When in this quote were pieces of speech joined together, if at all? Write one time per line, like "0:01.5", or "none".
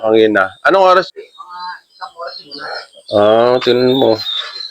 0:01.2